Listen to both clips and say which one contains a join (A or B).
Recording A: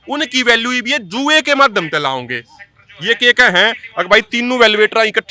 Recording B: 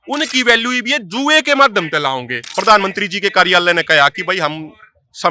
B